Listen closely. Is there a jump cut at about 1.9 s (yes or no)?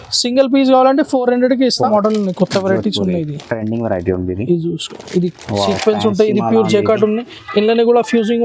yes